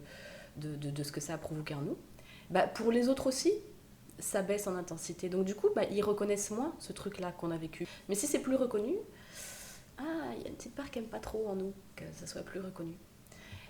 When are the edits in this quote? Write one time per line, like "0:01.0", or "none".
0:07.9